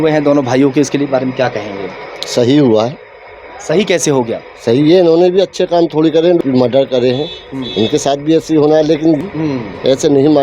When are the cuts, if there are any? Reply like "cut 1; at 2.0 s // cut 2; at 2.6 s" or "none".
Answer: cut 1; at 6.4 s // cut 2; at 9.2 s